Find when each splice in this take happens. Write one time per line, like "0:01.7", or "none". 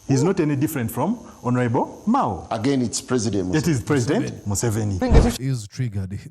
0:05.0